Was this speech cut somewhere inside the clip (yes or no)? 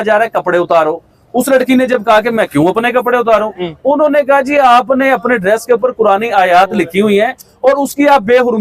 no